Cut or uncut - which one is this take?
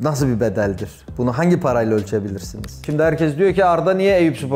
cut